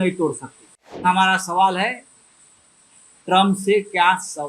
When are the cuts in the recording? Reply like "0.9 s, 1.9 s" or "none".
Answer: 1.0 s